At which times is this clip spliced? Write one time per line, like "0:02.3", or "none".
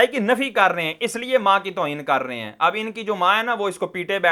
none